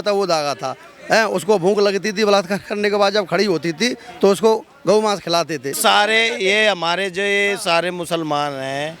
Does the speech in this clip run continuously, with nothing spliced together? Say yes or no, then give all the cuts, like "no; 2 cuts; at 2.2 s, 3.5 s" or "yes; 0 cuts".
no; 1 cut; at 5.7 s